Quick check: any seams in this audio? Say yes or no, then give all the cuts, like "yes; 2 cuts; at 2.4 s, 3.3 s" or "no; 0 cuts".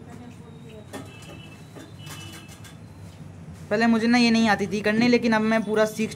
no; 0 cuts